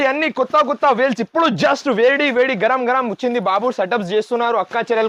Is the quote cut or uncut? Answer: uncut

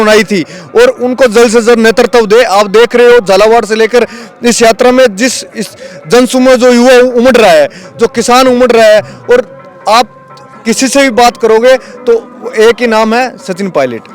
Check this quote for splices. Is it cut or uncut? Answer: uncut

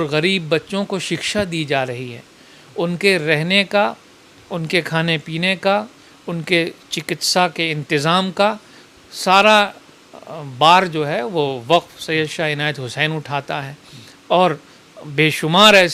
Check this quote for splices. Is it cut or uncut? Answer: uncut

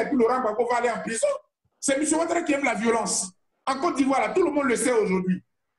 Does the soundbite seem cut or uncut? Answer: cut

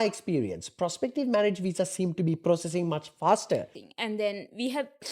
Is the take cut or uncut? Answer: cut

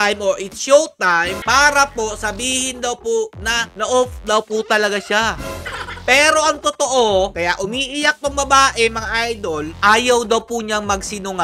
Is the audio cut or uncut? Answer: uncut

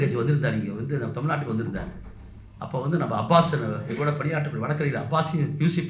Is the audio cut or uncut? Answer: uncut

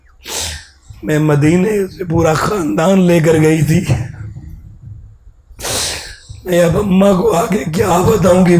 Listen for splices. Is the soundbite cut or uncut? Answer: uncut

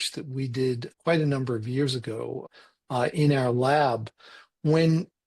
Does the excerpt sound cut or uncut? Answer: cut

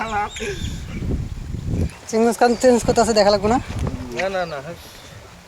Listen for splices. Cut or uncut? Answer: cut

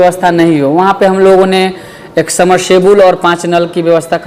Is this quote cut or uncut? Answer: uncut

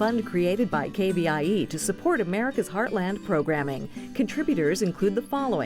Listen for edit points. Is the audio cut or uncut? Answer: uncut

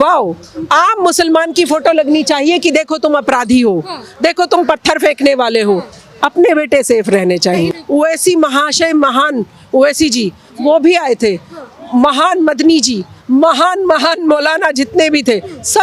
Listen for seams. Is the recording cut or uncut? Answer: cut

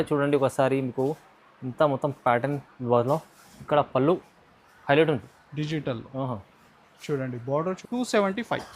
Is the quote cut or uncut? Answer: cut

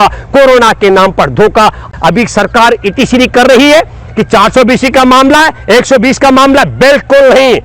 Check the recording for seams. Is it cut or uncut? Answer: cut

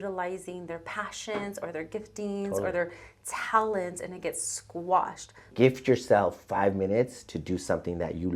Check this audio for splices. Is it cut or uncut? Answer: cut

